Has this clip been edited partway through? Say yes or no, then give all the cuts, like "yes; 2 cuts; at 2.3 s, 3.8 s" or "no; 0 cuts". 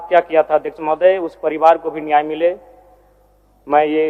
no; 0 cuts